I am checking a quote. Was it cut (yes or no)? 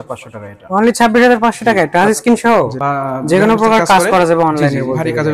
yes